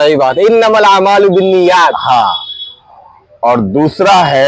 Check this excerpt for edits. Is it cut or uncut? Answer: uncut